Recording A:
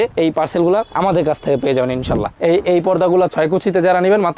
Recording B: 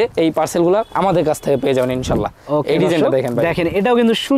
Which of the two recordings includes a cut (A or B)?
A